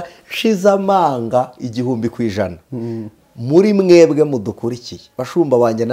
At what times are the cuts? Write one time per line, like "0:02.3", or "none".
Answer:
none